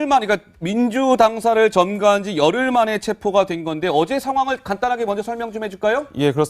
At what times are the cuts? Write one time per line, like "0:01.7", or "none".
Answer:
0:02.7